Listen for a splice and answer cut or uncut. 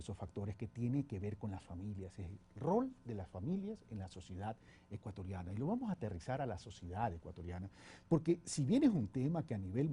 cut